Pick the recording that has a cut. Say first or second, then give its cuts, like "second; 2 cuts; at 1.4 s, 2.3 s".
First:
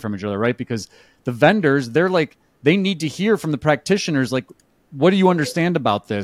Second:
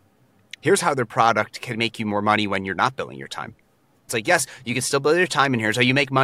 second; 1 cut; at 4.1 s